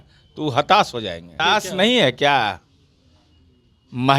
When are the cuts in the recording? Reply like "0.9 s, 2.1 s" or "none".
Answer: 1.3 s